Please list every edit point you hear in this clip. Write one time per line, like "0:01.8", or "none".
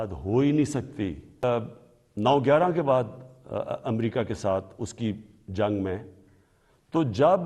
0:01.3